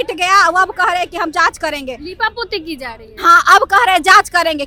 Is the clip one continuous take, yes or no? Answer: yes